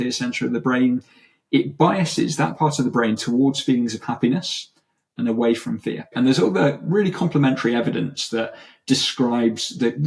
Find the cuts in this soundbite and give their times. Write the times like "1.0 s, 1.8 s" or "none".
6.1 s